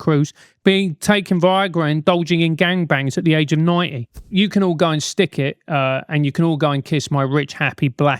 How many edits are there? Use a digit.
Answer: 1